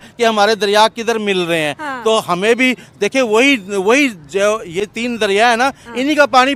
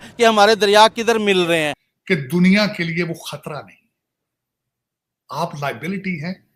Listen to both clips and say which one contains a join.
second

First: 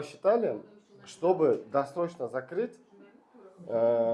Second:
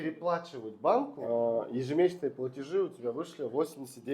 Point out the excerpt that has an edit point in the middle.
second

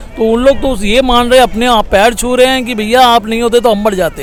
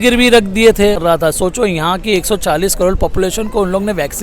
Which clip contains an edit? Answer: second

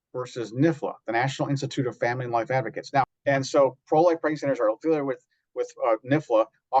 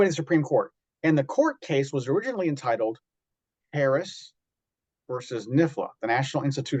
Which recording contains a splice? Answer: first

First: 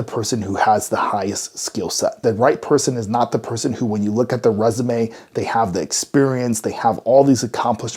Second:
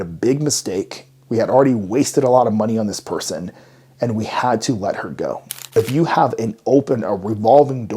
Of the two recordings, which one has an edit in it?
second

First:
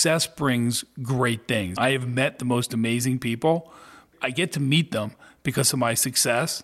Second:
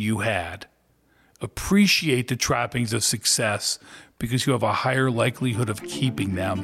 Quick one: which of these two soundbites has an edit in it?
first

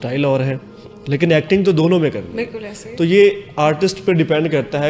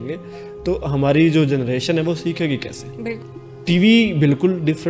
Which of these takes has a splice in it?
second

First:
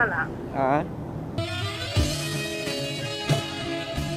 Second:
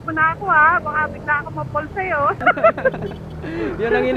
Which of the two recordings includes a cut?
second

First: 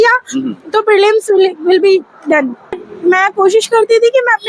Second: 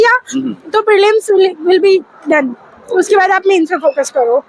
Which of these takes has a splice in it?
first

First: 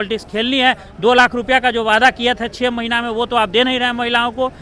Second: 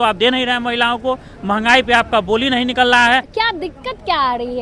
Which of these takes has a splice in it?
second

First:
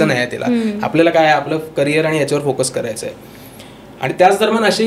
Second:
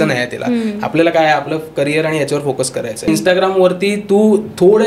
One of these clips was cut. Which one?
second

